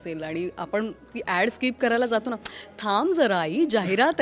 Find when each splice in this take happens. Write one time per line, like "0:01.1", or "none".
none